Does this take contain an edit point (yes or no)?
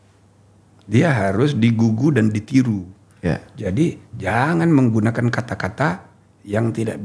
no